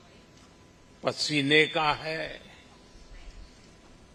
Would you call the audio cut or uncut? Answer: uncut